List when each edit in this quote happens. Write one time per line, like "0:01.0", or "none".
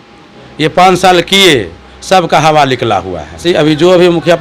0:03.4